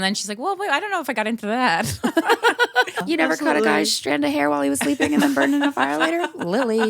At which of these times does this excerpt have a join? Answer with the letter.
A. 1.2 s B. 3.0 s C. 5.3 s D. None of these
B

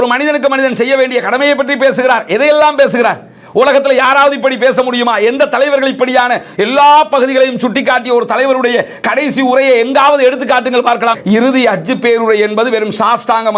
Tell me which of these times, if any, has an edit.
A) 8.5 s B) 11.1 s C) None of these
B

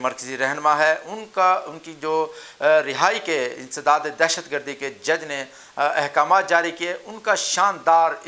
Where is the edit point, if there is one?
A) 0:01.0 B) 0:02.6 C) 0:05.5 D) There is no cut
D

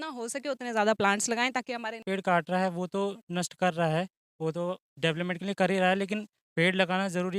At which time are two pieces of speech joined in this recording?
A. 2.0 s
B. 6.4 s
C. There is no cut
A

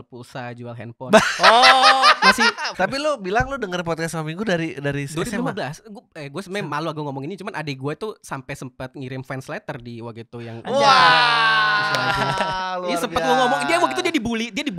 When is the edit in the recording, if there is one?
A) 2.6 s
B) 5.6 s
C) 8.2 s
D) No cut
A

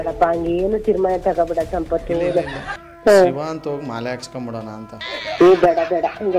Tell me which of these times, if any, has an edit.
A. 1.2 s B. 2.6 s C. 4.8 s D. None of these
B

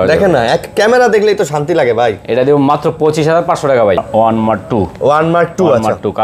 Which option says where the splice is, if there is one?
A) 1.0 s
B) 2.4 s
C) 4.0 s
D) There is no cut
C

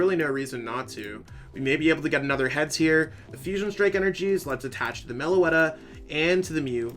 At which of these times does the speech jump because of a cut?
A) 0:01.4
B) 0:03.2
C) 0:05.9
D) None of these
B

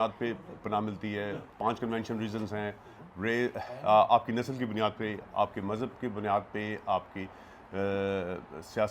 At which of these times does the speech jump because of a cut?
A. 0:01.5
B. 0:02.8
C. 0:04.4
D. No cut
A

